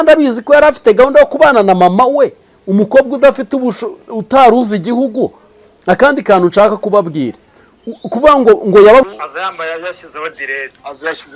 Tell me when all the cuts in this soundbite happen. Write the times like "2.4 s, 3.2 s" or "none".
9.1 s